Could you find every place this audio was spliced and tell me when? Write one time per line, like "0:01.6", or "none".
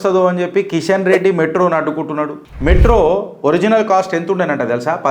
0:02.4